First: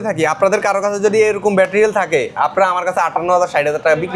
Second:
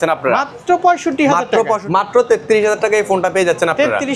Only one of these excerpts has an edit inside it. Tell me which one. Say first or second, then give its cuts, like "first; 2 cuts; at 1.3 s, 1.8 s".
second; 1 cut; at 1.8 s